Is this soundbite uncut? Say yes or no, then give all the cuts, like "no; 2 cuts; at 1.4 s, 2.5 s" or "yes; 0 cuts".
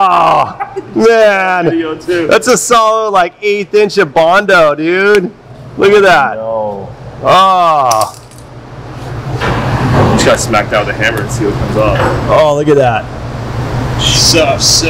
yes; 0 cuts